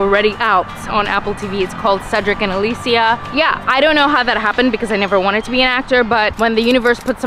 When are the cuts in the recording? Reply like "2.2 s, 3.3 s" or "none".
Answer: 3.3 s, 6.3 s